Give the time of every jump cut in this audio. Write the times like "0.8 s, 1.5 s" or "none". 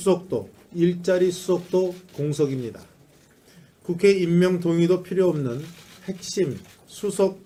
none

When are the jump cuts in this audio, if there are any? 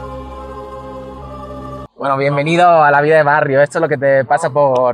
1.9 s

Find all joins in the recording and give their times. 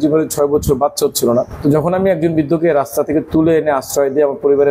1.5 s

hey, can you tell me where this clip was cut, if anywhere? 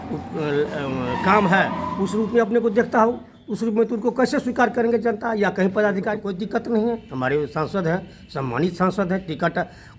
6.2 s

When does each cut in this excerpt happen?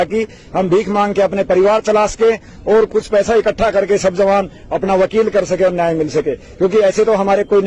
none

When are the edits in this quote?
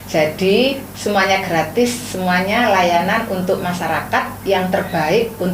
none

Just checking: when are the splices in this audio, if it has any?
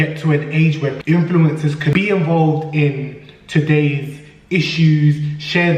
1.0 s, 1.9 s

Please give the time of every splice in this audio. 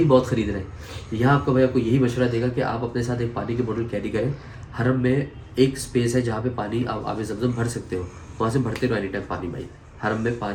none

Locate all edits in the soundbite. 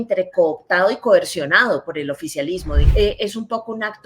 2.8 s

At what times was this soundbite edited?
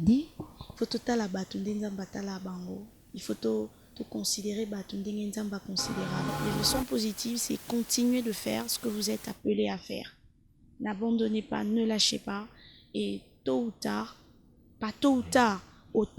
6.3 s

